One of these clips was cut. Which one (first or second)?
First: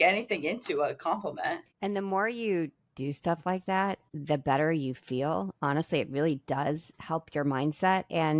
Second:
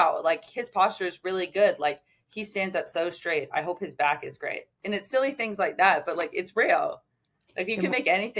first